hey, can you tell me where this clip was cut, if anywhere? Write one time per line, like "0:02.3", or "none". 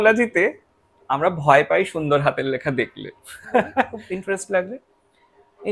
0:04.0